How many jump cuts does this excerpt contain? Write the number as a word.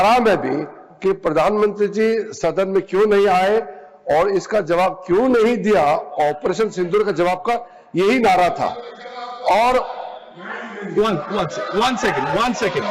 zero